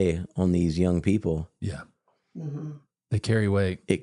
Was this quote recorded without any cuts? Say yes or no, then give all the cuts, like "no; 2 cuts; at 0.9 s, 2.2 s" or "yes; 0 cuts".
yes; 0 cuts